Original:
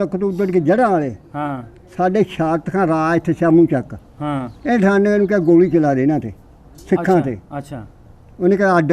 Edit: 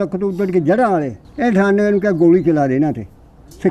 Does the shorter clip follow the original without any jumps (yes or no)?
no